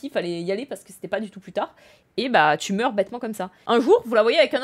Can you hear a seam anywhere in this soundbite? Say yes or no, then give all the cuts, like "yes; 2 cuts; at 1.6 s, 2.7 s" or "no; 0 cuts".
yes; 1 cut; at 3.5 s